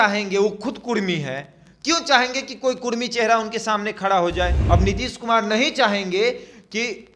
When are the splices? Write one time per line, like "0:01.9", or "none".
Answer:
0:04.6